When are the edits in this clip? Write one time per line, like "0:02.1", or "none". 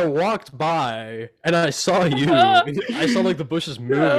none